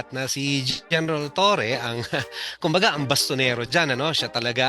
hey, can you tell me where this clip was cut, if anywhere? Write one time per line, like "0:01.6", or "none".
none